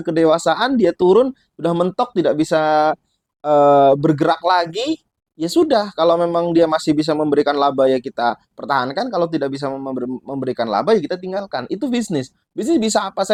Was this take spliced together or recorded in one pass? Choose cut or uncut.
uncut